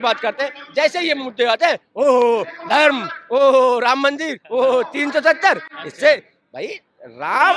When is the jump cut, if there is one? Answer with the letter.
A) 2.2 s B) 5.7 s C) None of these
C